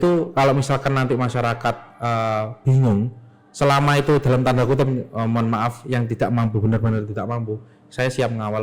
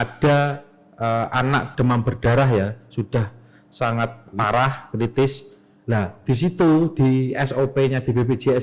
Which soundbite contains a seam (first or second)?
second